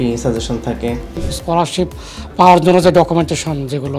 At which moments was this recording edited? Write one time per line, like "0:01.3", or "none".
0:01.2